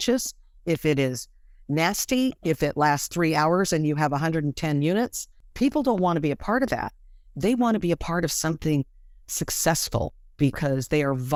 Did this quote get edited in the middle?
no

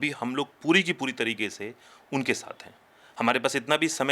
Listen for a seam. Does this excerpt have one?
no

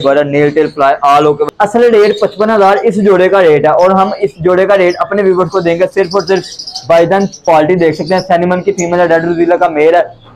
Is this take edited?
yes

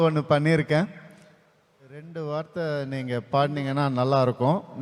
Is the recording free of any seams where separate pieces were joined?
no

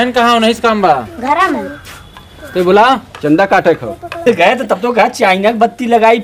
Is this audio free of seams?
no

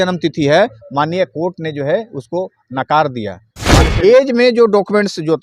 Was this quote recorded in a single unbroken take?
no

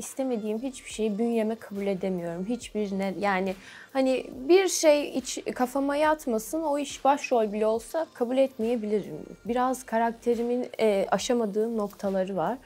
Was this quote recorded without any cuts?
yes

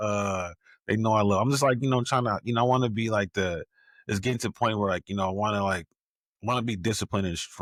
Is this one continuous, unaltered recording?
yes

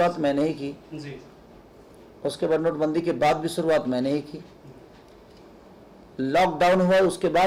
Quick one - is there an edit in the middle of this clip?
no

